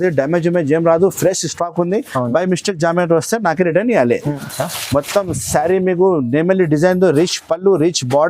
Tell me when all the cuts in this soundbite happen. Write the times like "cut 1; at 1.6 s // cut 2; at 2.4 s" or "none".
cut 1; at 4.4 s